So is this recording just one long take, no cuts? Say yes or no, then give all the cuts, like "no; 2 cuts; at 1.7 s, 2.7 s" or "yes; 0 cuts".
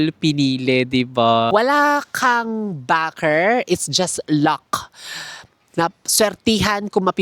no; 1 cut; at 1.5 s